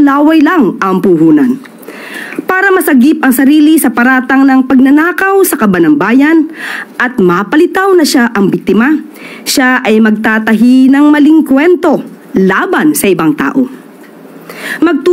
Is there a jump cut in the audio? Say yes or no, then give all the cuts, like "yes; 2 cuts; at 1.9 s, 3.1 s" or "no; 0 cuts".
no; 0 cuts